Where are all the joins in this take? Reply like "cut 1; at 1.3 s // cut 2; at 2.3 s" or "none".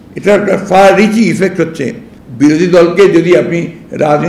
none